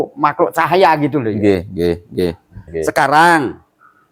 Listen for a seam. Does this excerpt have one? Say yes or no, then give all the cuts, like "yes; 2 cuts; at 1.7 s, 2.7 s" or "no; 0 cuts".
yes; 1 cut; at 2.6 s